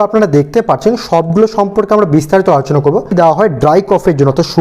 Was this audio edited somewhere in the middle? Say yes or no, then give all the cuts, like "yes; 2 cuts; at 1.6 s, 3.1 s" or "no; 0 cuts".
yes; 1 cut; at 3.1 s